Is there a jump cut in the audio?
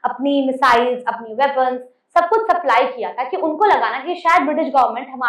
no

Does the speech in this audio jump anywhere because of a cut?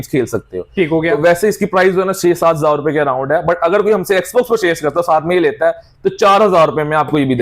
no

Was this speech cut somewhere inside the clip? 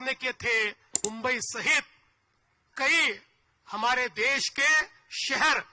yes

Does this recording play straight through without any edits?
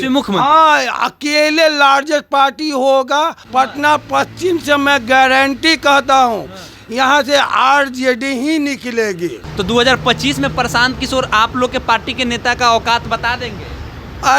no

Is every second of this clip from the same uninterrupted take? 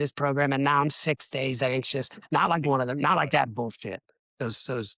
yes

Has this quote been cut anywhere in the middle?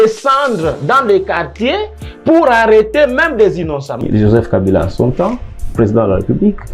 yes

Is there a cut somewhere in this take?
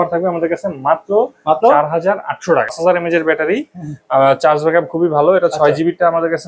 yes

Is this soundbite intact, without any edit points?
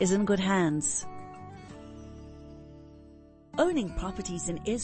yes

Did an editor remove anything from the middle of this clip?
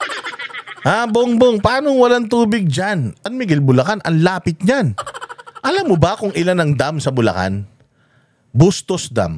yes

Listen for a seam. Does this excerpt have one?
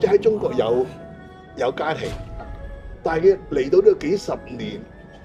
no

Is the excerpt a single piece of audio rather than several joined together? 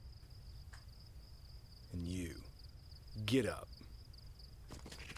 yes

